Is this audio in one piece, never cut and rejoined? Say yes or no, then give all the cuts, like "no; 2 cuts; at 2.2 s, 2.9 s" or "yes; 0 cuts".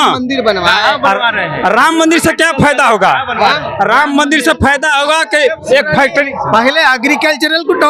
yes; 0 cuts